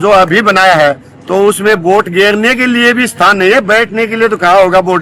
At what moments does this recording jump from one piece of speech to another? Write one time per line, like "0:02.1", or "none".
none